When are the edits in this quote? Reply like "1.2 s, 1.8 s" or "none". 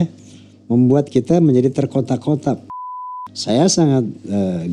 3.0 s